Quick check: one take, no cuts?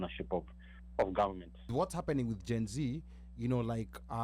no; 1 cut; at 1.7 s

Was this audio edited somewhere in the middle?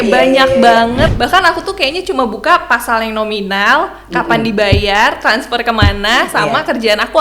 yes; 1 cut; at 1.1 s

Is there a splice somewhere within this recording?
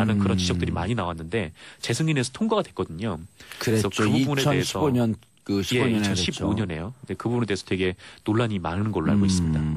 no; 0 cuts

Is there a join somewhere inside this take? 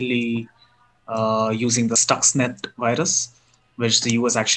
yes; 1 cut; at 2.0 s

